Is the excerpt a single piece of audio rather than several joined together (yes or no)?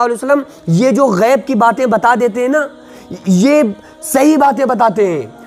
yes